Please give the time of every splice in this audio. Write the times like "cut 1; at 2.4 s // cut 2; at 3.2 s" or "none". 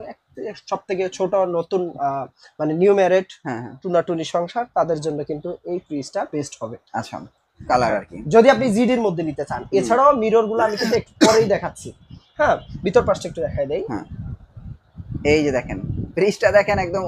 cut 1; at 7.5 s